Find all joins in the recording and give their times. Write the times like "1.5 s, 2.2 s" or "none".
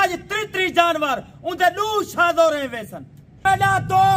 3.2 s